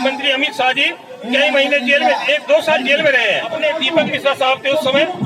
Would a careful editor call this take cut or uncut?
cut